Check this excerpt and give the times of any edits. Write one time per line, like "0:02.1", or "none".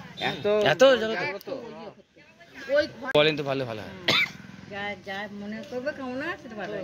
0:03.0